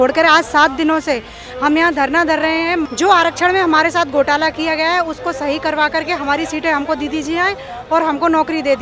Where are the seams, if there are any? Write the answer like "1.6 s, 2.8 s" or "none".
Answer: 2.9 s